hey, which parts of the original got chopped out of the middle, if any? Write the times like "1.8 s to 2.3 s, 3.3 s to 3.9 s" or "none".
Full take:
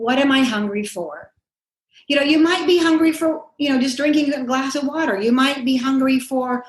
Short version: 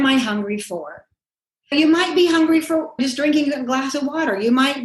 2.0 s to 2.2 s, 3.5 s to 3.8 s